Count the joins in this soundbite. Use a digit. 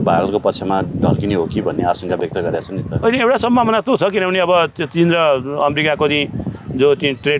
0